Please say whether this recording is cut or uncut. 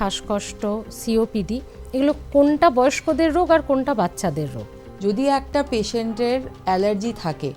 cut